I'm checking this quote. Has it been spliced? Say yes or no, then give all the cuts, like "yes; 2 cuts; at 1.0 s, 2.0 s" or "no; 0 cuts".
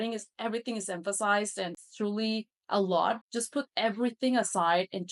yes; 2 cuts; at 1.9 s, 3.3 s